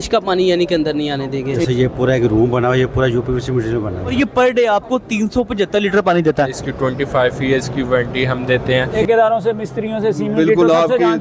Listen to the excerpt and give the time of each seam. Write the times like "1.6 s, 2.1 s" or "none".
1.7 s, 4.1 s, 6.6 s, 8.9 s